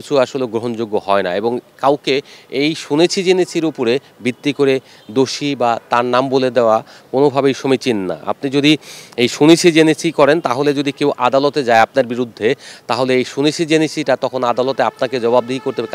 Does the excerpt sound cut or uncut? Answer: uncut